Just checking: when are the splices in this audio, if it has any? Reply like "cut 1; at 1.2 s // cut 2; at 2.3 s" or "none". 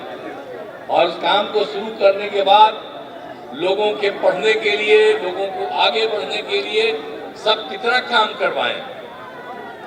none